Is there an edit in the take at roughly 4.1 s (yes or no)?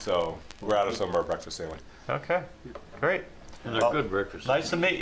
no